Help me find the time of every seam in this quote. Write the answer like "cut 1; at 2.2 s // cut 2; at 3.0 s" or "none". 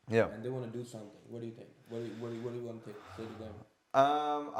none